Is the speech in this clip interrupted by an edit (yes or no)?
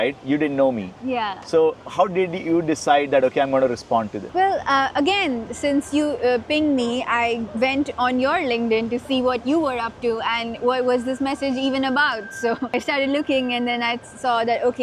no